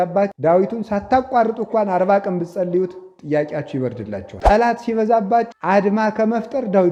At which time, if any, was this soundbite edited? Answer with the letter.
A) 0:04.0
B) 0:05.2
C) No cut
C